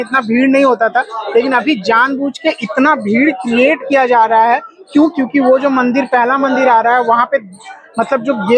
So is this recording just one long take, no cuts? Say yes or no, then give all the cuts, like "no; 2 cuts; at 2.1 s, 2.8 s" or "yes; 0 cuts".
yes; 0 cuts